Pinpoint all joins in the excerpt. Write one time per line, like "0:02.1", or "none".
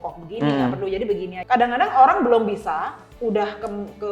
0:01.3